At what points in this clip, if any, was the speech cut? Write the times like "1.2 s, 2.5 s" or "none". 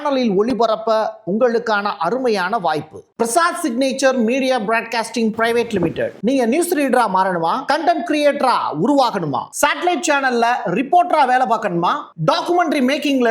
3.0 s

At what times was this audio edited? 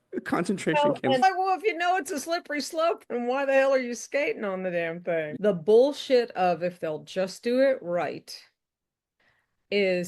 1.2 s, 5.3 s

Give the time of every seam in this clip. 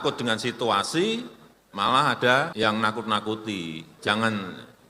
2.5 s, 3.9 s

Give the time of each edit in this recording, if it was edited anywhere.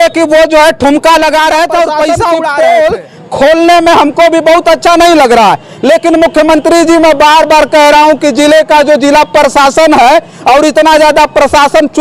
2.5 s

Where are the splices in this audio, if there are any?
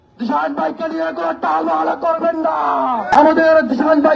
3.2 s

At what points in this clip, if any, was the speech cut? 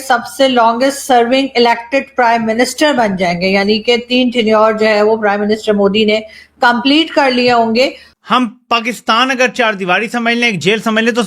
8.1 s

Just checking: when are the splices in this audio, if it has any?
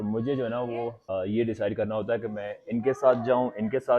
1.0 s

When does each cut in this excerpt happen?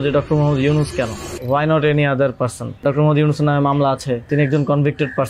1.3 s, 2.8 s, 4.3 s

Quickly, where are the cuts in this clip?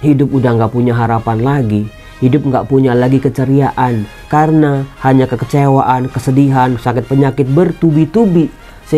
4.2 s

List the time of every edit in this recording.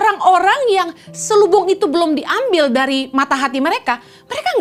none

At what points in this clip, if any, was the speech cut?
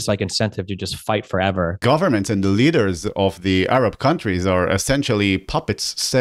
1.8 s

